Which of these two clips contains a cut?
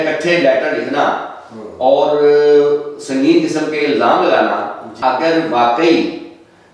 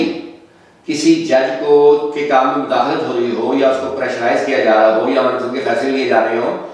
first; 1 cut; at 4.9 s

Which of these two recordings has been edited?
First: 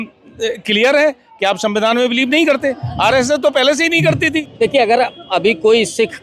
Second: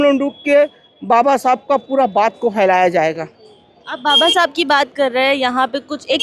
first; 1 cut; at 4.5 s

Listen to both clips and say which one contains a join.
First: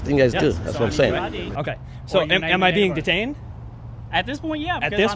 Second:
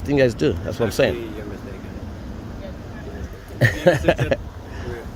first; 1 cut; at 1.3 s

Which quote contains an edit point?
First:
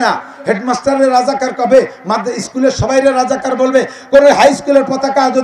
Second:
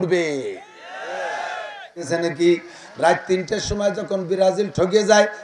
second; 1 cut; at 2.1 s

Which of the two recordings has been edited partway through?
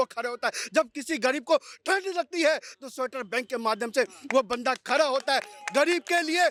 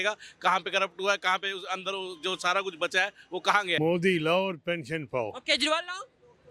second; 1 cut; at 3.8 s

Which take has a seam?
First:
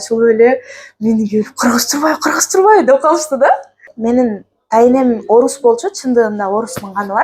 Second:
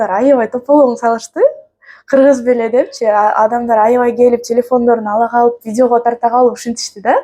first; 1 cut; at 3.9 s

